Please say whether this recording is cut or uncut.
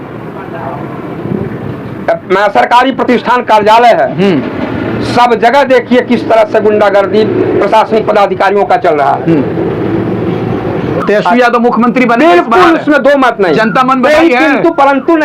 cut